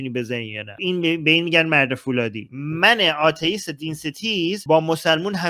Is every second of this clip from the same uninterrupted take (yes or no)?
no